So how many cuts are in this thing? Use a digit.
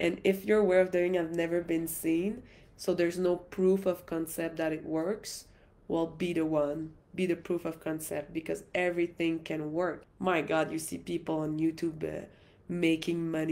0